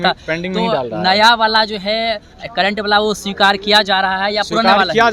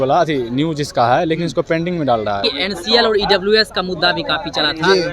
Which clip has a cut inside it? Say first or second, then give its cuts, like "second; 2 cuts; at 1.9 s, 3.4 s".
second; 1 cut; at 2.4 s